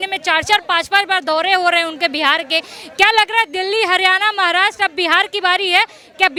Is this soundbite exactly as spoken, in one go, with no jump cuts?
yes; 0 cuts

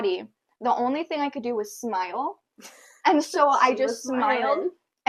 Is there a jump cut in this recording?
no; 0 cuts

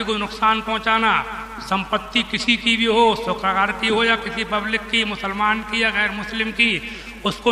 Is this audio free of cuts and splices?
yes; 0 cuts

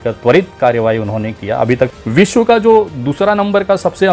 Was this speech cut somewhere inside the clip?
yes; 1 cut; at 1.9 s

